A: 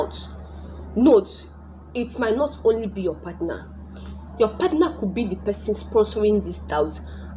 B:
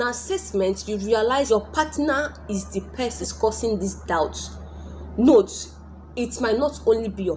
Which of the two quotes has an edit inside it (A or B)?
B